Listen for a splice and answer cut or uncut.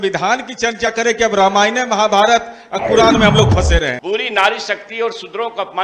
cut